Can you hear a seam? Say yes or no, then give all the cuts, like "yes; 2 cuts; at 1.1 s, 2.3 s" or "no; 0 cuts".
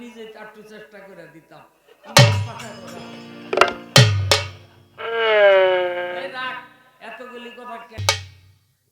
yes; 1 cut; at 8.0 s